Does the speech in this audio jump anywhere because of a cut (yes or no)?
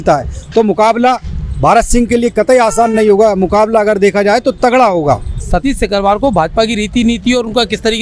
yes